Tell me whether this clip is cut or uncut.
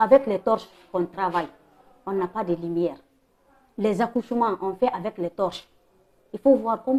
uncut